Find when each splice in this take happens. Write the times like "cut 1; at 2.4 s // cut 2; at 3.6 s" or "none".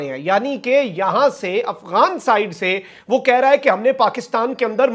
none